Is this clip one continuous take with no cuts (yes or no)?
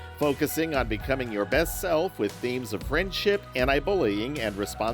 yes